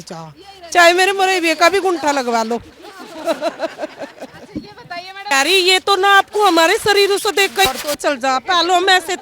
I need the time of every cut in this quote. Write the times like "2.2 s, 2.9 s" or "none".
5.3 s